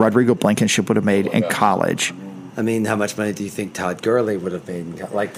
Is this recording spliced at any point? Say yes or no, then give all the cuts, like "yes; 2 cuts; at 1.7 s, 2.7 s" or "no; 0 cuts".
yes; 1 cut; at 2.1 s